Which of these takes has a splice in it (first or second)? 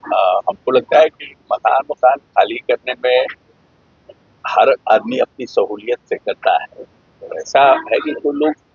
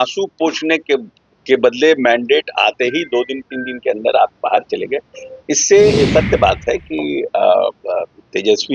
second